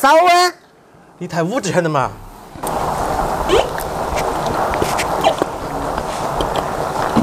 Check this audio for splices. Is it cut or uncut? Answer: uncut